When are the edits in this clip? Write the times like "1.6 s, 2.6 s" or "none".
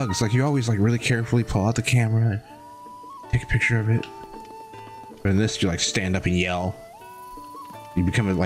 none